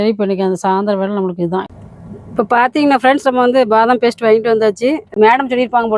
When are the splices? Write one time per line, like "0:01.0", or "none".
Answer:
0:01.7
0:05.2

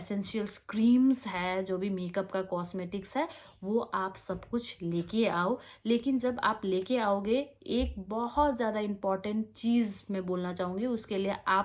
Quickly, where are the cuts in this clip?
none

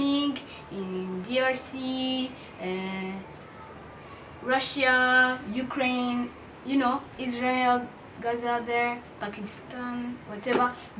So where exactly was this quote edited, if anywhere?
none

